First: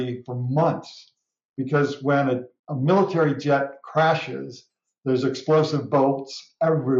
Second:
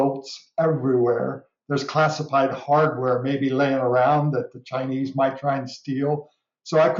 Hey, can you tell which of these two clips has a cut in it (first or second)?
first